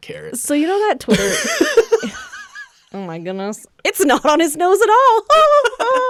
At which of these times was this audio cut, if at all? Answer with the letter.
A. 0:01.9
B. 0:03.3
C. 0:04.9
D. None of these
D